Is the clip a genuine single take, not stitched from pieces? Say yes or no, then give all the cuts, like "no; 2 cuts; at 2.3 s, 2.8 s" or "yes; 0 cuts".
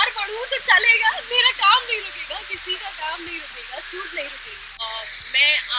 no; 1 cut; at 4.7 s